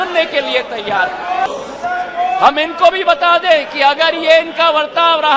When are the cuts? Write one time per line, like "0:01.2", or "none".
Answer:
0:01.5